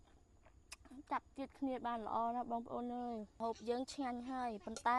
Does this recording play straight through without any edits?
no; 1 cut; at 3.4 s

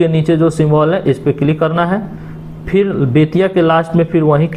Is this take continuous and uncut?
yes; 0 cuts

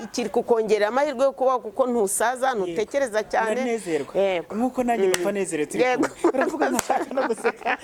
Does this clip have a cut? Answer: no; 0 cuts

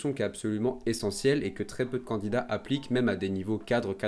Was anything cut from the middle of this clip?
no; 0 cuts

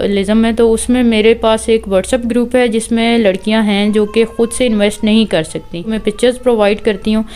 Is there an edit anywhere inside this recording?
yes; 1 cut; at 5.9 s

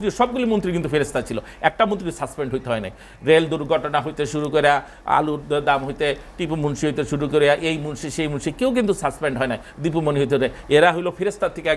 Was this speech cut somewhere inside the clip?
no; 0 cuts

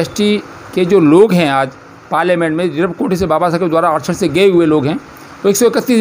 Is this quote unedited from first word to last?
yes; 0 cuts

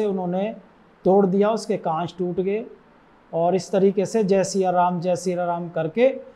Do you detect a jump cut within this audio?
no; 0 cuts

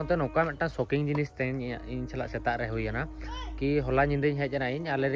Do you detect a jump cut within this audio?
no; 0 cuts

